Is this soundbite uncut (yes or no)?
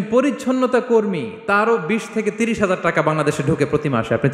yes